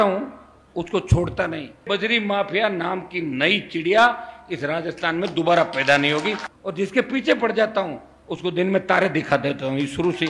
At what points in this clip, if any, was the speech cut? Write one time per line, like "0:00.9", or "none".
0:01.8
0:06.5